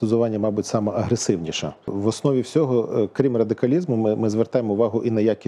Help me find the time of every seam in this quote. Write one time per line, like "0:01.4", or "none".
0:01.9